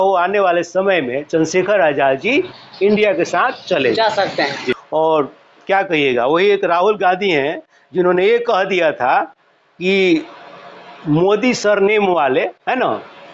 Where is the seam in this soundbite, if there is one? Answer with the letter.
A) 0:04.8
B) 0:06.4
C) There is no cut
A